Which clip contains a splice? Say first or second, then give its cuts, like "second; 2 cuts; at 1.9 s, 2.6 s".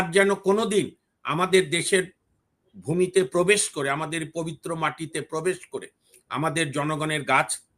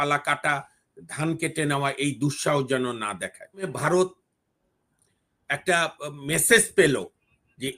second; 1 cut; at 3.7 s